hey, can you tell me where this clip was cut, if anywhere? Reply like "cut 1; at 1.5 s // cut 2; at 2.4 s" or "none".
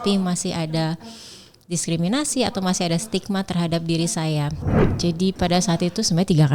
cut 1; at 4.7 s